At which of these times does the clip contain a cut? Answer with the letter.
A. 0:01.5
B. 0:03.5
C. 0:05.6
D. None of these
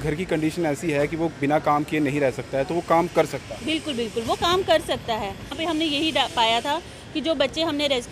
C